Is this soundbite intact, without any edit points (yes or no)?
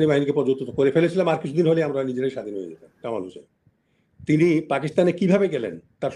no